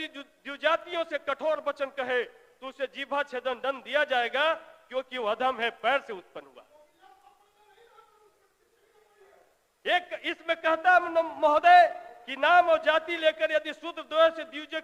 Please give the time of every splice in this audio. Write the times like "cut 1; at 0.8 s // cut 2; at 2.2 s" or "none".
none